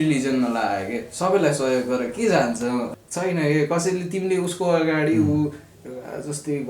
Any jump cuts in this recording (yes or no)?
yes